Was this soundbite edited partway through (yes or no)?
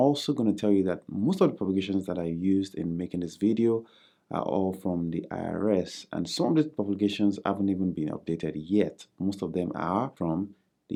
no